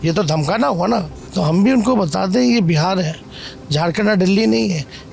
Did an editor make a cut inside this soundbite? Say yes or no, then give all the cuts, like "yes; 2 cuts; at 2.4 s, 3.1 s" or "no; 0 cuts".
yes; 1 cut; at 1.2 s